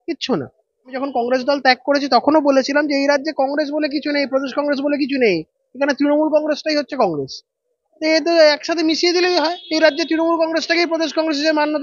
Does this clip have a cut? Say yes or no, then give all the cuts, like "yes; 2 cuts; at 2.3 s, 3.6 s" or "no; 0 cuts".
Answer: yes; 1 cut; at 1.0 s